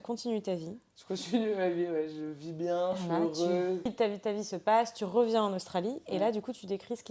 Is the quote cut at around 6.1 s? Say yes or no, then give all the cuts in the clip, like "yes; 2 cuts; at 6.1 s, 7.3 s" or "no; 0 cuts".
no; 1 cut; at 3.9 s